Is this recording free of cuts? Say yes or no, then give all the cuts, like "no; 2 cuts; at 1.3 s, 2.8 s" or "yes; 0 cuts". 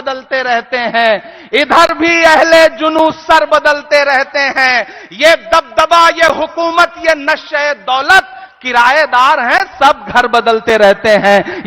yes; 0 cuts